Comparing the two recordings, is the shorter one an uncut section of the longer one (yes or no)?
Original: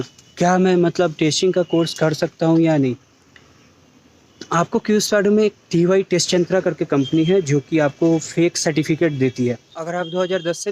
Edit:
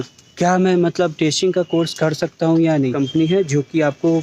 no